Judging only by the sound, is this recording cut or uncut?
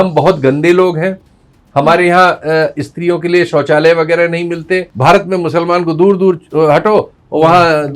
cut